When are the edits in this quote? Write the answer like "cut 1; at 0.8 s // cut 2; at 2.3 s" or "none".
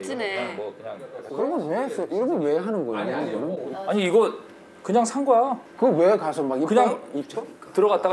none